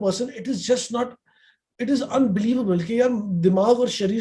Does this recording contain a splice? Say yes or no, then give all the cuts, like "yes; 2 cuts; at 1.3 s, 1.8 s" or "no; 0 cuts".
no; 0 cuts